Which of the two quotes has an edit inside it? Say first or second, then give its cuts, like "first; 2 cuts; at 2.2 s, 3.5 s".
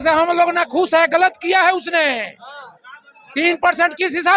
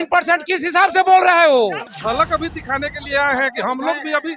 second; 1 cut; at 1.9 s